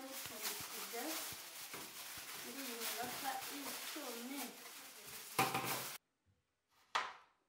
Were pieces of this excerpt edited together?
yes; 1 cut; at 6.0 s

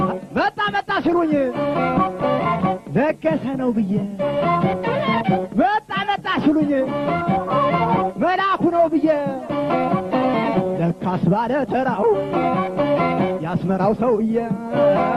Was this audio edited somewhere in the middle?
no; 0 cuts

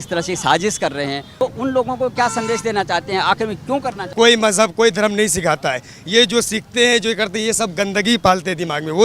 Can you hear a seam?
yes; 2 cuts; at 1.4 s, 4.0 s

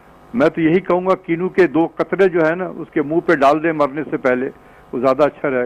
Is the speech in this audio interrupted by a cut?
no; 0 cuts

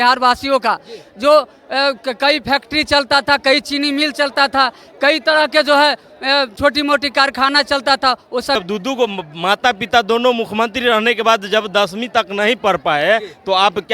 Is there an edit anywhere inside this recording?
yes; 1 cut; at 8.6 s

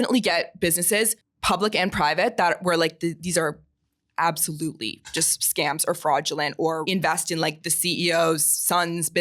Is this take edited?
yes; 2 cuts; at 1.3 s, 6.8 s

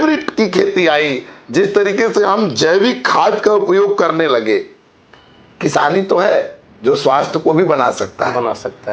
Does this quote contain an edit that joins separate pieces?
no; 0 cuts

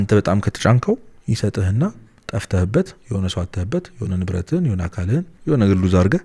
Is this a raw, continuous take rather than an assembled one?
no; 1 cut; at 5.3 s

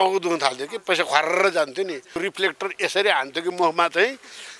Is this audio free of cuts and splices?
no; 1 cut; at 2.2 s

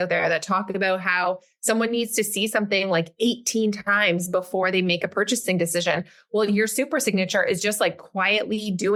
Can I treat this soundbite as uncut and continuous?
yes; 0 cuts

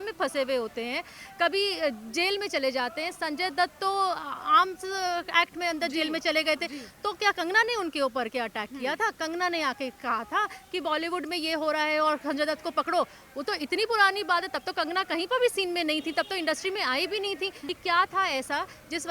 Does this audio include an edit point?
yes; 1 cut; at 17.6 s

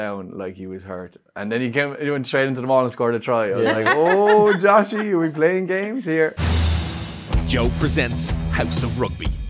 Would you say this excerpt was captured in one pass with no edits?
no; 1 cut; at 6.4 s

